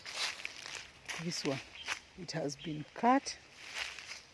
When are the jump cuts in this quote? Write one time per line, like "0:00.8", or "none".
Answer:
0:01.1